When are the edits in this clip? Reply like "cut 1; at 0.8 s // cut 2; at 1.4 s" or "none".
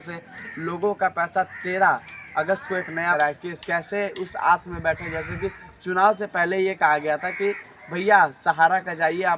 cut 1; at 3.1 s